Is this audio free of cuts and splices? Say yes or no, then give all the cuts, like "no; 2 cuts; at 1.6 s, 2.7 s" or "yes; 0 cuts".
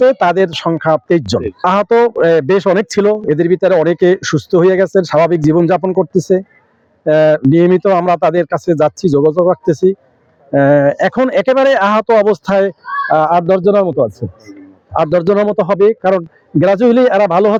yes; 0 cuts